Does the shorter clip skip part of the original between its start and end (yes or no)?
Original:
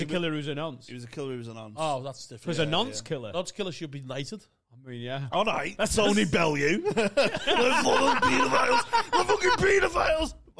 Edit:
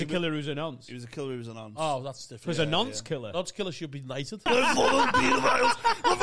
yes